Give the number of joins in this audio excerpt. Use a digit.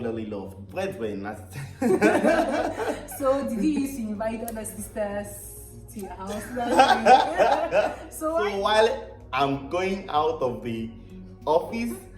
1